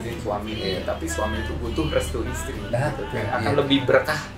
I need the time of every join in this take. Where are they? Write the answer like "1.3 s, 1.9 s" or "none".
none